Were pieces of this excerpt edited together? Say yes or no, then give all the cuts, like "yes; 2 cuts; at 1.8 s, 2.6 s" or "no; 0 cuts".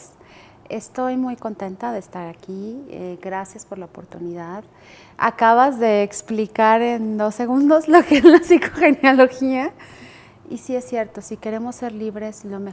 yes; 1 cut; at 10.9 s